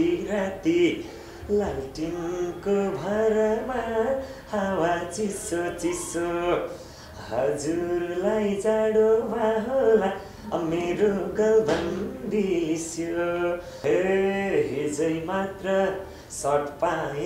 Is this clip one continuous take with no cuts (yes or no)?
no